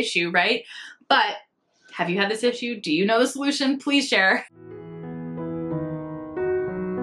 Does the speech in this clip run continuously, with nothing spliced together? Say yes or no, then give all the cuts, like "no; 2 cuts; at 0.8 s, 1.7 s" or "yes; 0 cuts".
no; 1 cut; at 4.6 s